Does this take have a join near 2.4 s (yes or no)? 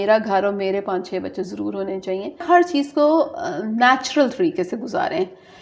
yes